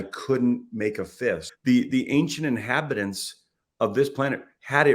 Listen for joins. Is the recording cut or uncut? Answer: cut